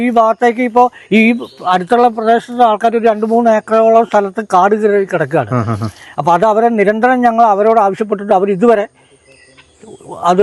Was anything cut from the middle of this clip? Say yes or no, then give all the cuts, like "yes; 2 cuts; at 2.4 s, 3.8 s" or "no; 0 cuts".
no; 0 cuts